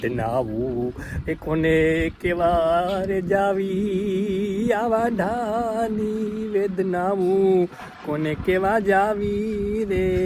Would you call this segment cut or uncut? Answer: uncut